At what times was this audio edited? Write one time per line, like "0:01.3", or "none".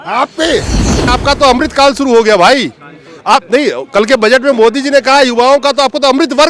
0:01.2